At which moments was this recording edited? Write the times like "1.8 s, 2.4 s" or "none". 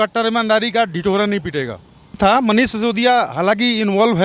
2.2 s